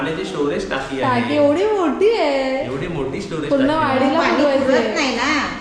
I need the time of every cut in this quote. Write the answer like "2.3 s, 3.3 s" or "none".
none